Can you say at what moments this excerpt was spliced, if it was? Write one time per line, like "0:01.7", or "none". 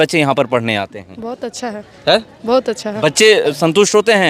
none